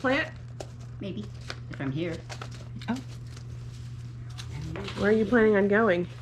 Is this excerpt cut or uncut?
uncut